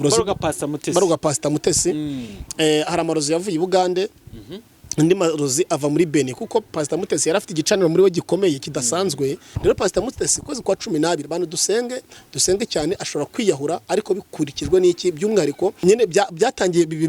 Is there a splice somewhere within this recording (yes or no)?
yes